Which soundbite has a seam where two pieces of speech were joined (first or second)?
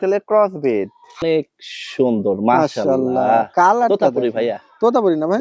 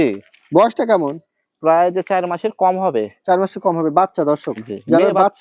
first